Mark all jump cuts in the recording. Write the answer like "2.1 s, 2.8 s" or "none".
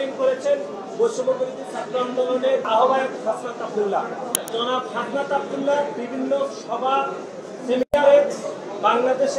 2.7 s, 4.4 s

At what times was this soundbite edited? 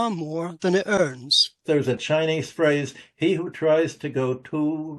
1.6 s

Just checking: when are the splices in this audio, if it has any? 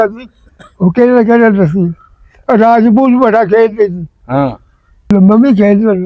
5.1 s

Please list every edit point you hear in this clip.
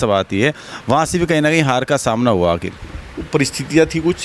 none

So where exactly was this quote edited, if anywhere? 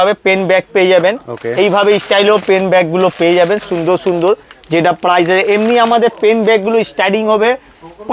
none

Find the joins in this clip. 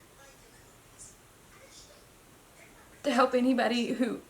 2.9 s

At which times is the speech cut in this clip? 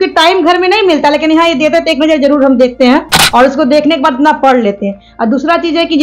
none

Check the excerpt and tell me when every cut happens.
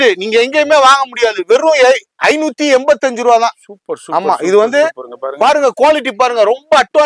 none

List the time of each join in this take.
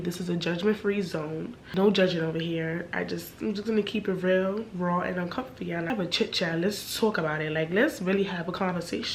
1.6 s, 5.9 s

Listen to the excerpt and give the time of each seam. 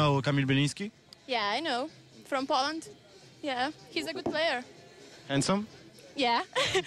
none

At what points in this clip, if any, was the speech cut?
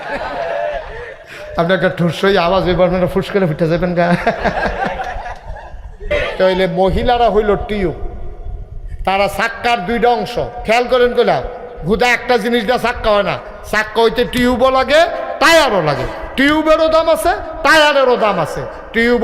6.0 s

